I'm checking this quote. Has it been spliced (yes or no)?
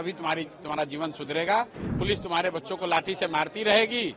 yes